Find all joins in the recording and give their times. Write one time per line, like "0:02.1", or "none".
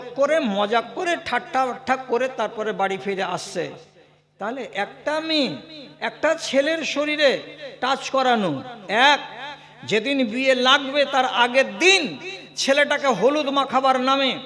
none